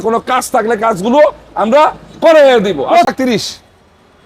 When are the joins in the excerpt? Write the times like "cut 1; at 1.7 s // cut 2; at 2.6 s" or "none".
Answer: cut 1; at 3.1 s